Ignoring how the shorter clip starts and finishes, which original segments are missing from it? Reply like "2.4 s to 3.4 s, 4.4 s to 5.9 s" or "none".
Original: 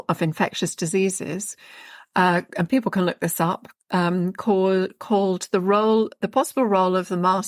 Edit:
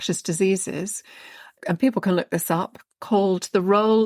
2.1 s to 2.5 s, 3.8 s to 4.9 s